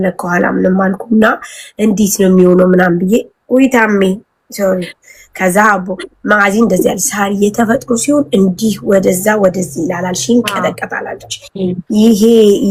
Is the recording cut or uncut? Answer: uncut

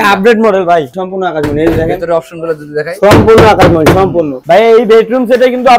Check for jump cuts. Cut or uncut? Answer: cut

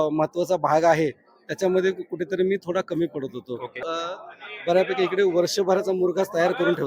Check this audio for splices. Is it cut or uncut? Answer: cut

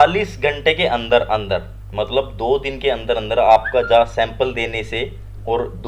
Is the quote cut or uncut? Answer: uncut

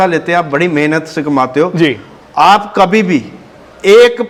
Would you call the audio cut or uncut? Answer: uncut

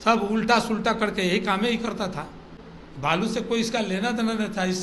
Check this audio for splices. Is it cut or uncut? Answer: cut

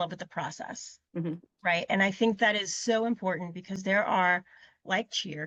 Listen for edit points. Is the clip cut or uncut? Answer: uncut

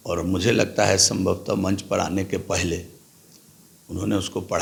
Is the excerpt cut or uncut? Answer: uncut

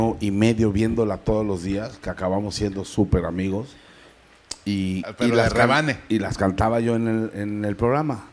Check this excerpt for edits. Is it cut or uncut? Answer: cut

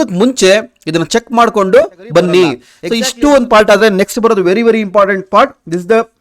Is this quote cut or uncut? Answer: cut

